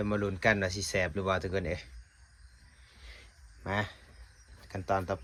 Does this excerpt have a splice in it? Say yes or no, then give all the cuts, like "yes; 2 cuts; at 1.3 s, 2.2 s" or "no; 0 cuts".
no; 0 cuts